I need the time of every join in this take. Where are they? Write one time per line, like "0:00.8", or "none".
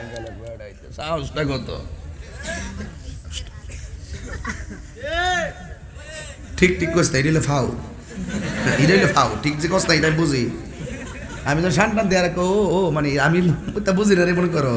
none